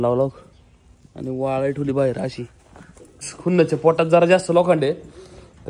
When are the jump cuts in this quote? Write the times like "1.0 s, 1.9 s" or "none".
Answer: 3.3 s